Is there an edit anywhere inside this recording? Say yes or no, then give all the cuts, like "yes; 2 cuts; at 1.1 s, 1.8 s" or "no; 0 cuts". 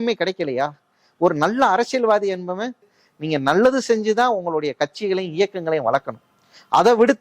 yes; 1 cut; at 3.0 s